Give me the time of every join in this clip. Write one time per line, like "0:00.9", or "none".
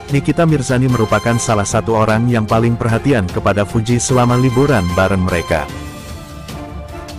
none